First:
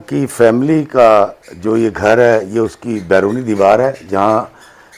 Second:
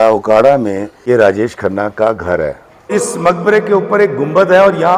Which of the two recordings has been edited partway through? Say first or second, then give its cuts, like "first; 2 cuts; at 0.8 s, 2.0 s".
second; 2 cuts; at 0.9 s, 2.9 s